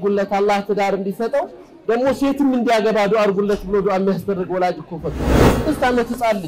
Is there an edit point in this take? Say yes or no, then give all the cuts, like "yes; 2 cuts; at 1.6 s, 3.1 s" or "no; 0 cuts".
yes; 1 cut; at 5.6 s